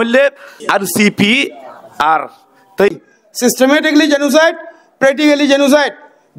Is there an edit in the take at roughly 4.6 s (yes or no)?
no